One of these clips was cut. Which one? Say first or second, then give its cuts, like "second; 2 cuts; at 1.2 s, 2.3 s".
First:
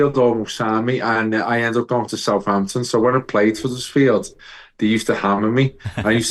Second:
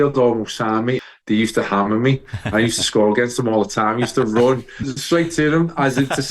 second; 2 cuts; at 1.0 s, 4.9 s